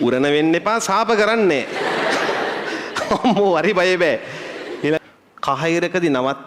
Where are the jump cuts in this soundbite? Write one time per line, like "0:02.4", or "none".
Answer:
0:05.0